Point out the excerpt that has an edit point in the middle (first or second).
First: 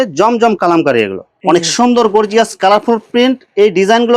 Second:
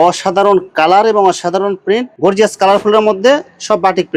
first